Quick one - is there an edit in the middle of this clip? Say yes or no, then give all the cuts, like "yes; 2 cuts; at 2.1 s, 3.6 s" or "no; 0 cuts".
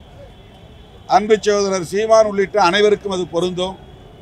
no; 0 cuts